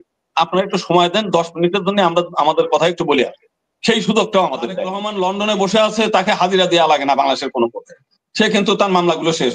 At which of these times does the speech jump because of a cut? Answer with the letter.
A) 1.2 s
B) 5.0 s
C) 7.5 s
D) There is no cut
B